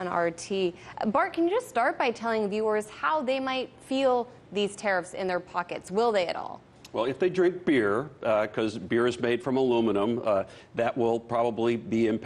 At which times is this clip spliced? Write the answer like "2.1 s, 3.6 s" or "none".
7.2 s